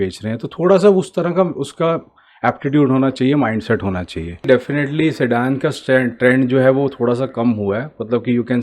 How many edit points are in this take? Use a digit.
1